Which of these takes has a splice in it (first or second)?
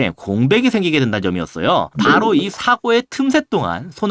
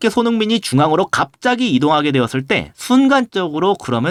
first